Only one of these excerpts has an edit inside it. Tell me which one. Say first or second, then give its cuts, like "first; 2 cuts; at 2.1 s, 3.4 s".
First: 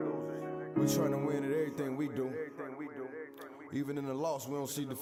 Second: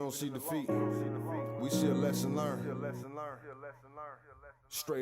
second; 1 cut; at 4.0 s